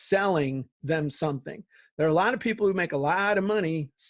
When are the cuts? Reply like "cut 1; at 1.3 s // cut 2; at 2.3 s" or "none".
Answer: none

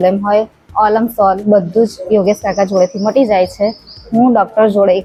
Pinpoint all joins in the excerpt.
none

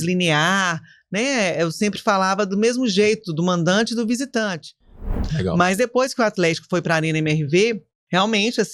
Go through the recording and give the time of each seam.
cut 1; at 5.3 s

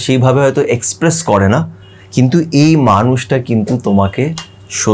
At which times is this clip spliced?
none

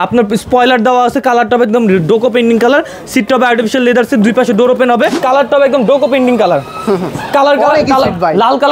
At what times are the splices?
cut 1; at 5.1 s

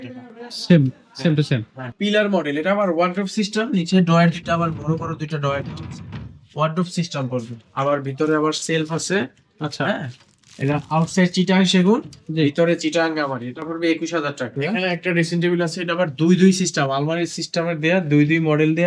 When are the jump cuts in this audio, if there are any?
cut 1; at 1.9 s // cut 2; at 14.5 s

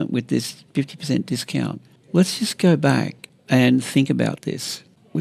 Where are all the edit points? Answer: none

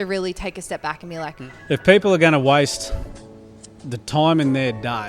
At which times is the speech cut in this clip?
cut 1; at 1.7 s

